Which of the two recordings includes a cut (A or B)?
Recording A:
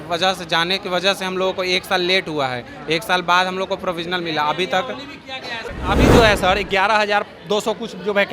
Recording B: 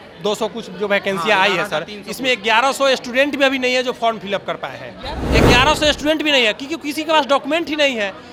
A